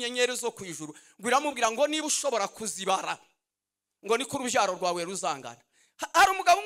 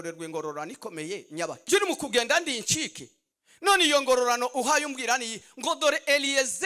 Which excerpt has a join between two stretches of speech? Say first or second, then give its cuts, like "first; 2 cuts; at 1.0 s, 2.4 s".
second; 1 cut; at 1.6 s